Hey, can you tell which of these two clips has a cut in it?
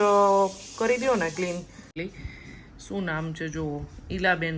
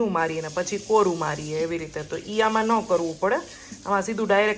first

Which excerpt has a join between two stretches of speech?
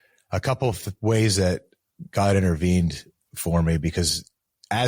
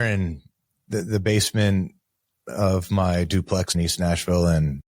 second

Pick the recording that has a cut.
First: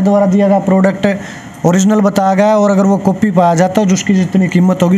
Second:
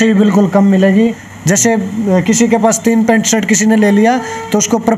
second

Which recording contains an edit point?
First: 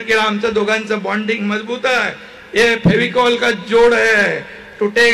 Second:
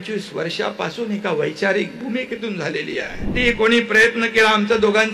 second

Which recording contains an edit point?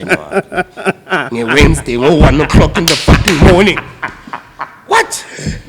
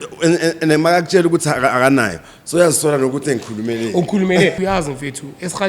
second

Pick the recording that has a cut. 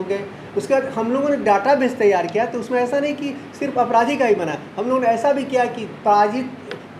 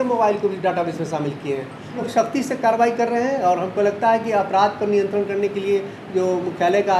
second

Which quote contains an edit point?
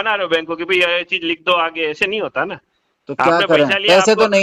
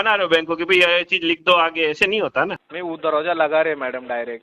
second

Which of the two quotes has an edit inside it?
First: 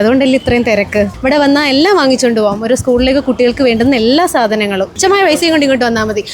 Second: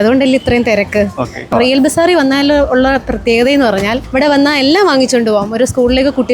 first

